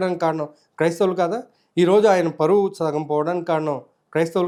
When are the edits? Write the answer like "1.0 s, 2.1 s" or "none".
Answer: none